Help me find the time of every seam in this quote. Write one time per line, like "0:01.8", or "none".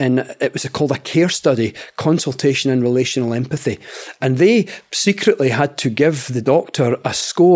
0:06.3